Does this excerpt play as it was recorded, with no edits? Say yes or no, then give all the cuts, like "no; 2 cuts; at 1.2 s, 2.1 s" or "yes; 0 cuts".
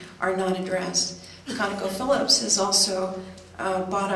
no; 1 cut; at 2.6 s